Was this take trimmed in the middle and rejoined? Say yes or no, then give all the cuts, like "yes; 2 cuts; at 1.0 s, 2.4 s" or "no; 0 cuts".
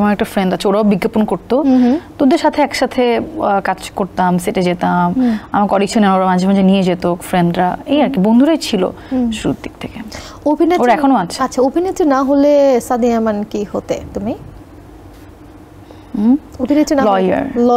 no; 0 cuts